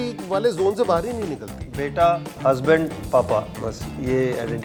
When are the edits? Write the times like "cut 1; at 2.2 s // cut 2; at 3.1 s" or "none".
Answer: none